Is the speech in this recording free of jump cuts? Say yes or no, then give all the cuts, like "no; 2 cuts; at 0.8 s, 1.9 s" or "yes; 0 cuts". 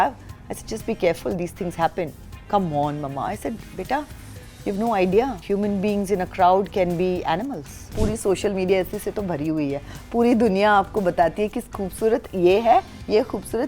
no; 2 cuts; at 5.4 s, 7.9 s